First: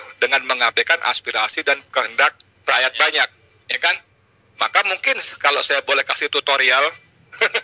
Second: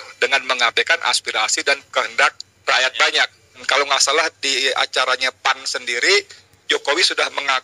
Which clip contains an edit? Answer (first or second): second